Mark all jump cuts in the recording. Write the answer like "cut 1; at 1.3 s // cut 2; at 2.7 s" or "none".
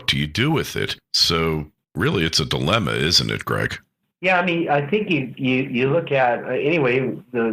none